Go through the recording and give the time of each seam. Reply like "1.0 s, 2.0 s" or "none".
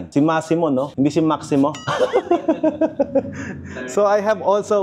none